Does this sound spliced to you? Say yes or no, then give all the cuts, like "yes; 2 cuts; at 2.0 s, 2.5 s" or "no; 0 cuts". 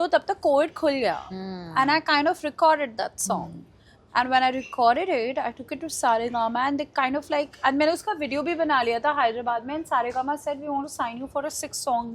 no; 0 cuts